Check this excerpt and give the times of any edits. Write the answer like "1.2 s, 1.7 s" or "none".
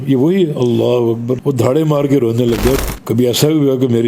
1.4 s, 2.8 s